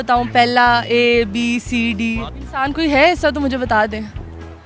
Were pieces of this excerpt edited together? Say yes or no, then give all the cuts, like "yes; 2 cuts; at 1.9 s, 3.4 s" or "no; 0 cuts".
yes; 1 cut; at 2.3 s